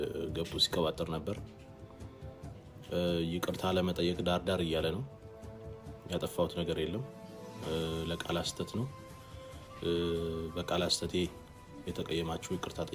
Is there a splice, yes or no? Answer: no